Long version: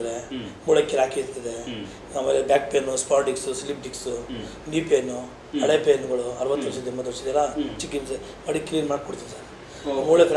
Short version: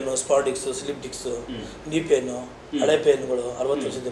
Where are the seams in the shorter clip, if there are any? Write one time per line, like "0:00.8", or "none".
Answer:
none